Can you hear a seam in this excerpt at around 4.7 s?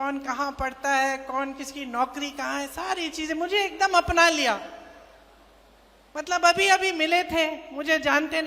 no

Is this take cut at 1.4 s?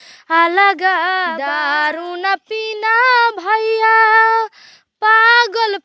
yes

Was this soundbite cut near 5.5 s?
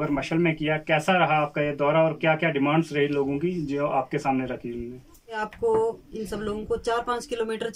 yes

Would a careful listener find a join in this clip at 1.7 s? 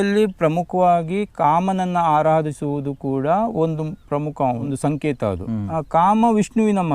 no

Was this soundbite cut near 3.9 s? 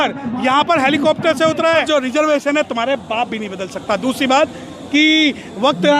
no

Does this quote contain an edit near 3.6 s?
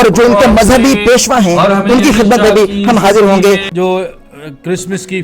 yes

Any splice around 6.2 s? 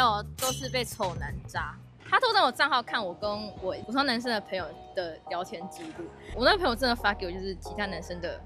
yes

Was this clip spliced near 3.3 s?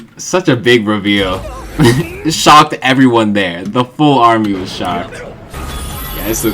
no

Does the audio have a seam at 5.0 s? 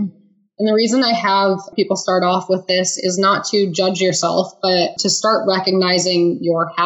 yes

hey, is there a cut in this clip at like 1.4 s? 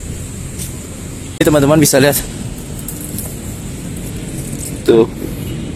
yes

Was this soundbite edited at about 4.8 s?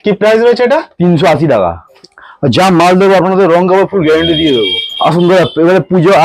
yes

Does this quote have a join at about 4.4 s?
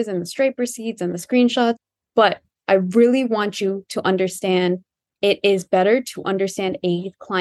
no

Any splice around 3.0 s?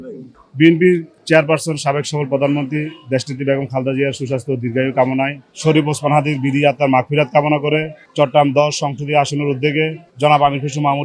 no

